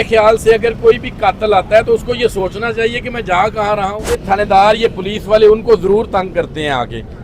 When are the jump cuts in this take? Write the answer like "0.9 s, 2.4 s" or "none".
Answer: 4.1 s

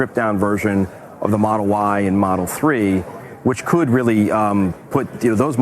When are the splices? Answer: none

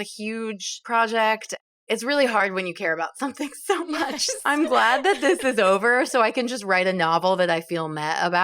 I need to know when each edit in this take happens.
1.6 s

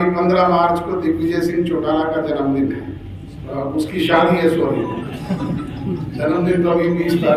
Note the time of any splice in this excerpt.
none

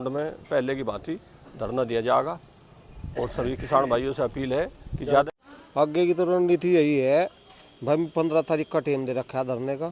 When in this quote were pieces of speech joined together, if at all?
5.3 s

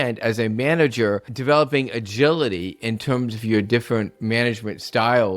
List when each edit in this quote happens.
1.3 s

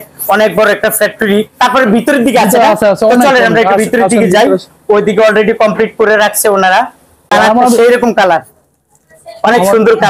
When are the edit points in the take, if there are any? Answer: 7.3 s

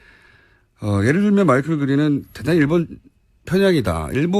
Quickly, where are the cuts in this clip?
2.6 s

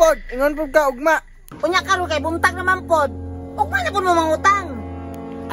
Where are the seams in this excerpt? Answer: 1.4 s

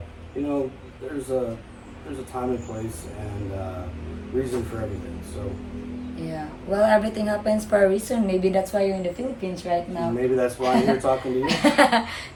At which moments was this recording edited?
none

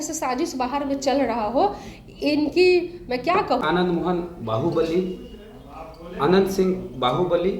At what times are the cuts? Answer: 3.6 s

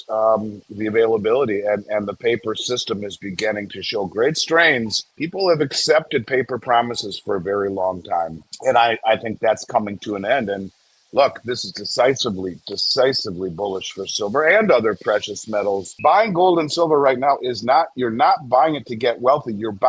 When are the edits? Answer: 15.9 s

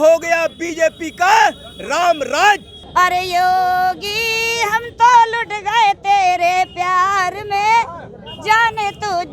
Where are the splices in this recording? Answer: 2.7 s

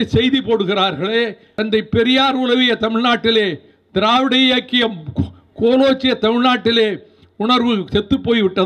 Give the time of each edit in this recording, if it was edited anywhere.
1.5 s

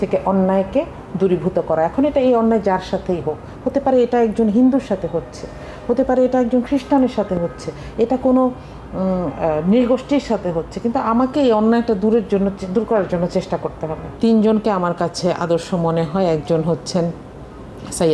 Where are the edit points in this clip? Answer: none

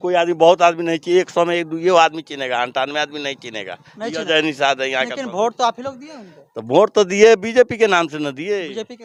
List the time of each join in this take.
none

